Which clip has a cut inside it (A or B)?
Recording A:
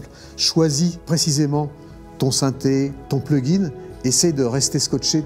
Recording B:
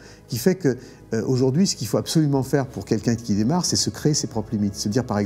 A